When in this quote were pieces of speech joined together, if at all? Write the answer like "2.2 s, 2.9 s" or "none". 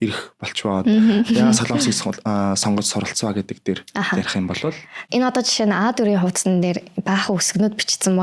4.9 s

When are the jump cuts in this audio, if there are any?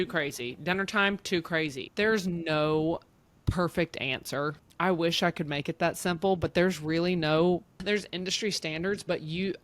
1.8 s, 4.6 s, 7.8 s

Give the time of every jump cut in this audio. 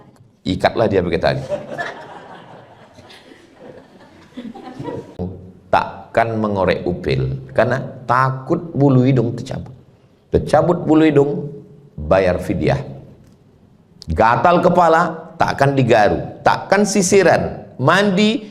5.2 s

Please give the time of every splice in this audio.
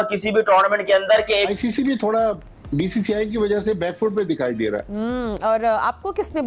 1.5 s

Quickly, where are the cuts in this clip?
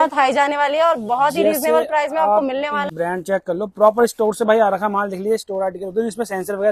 2.8 s

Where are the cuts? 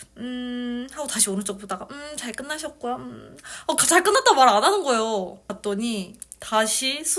5.4 s

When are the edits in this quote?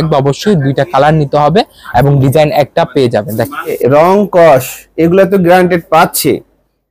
3.8 s

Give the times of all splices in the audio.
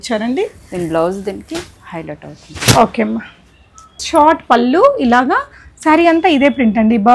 4.0 s

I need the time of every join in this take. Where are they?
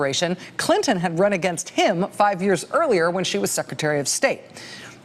none

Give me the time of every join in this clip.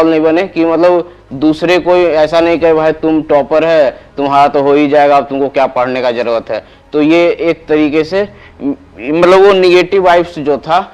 none

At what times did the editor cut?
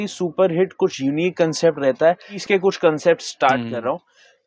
2.3 s

